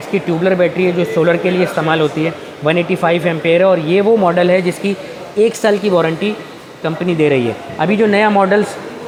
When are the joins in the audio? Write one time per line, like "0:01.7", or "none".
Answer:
none